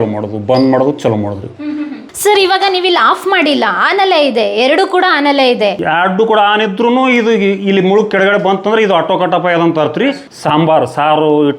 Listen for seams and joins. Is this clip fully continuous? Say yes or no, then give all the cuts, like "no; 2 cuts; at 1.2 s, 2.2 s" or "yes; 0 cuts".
no; 2 cuts; at 2.0 s, 10.3 s